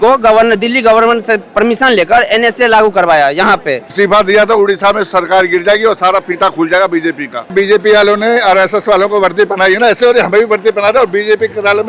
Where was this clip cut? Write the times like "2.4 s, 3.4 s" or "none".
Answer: 3.8 s, 7.5 s